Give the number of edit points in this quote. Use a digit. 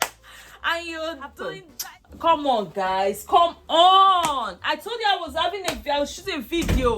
1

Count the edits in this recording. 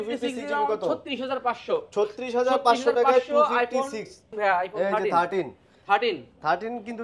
1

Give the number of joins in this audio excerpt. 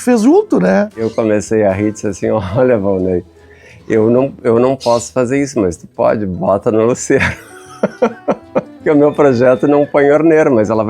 2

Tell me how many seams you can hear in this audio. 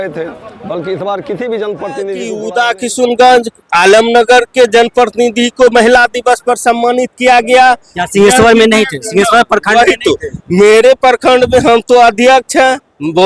1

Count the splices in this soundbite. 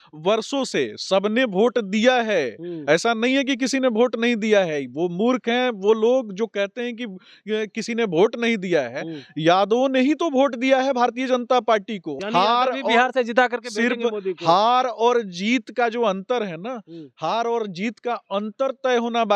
1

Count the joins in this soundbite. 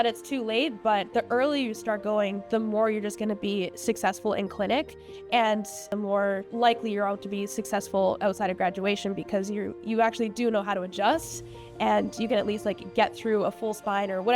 1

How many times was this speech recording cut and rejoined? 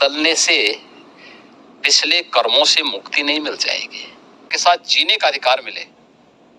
1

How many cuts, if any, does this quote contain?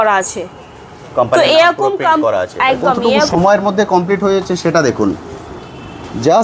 1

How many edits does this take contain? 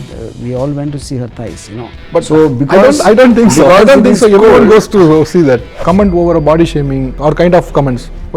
2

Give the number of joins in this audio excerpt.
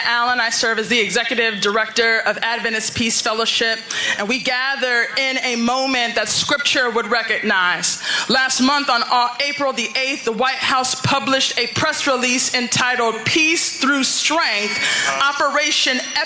0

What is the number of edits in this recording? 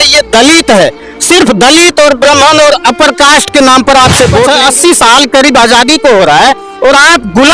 1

